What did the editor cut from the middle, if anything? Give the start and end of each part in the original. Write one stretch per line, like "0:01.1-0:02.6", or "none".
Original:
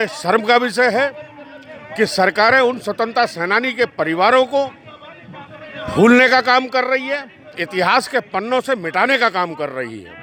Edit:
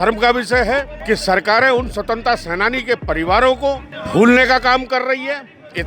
0:01.2-0:01.8
0:04.8-0:05.8